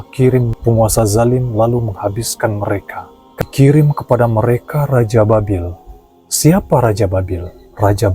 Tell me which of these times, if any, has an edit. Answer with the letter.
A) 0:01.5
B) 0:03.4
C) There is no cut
B